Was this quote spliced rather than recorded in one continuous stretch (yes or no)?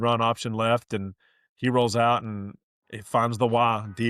no